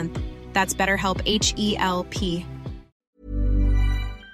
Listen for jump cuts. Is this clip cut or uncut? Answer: cut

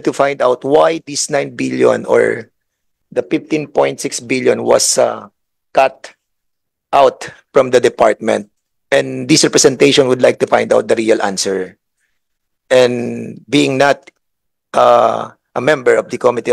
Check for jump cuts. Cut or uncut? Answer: uncut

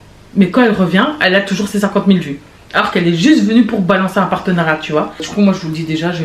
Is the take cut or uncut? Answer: cut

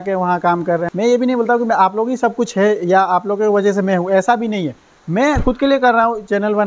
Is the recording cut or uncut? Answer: cut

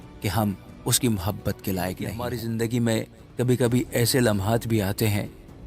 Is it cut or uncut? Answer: cut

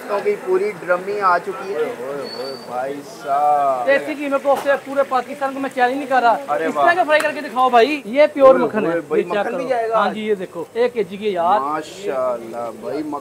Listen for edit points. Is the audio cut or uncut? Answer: cut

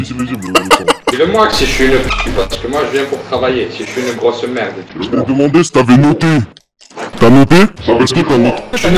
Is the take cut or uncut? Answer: cut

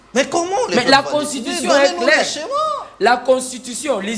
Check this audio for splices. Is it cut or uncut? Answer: uncut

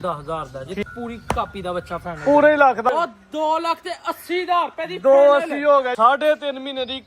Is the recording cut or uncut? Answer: cut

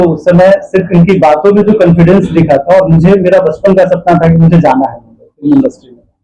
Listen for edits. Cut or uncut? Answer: uncut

